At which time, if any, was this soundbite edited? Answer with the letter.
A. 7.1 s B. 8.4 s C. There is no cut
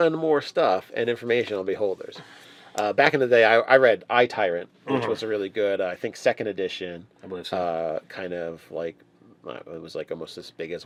C